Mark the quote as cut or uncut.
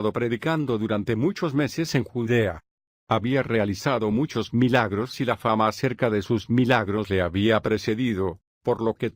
uncut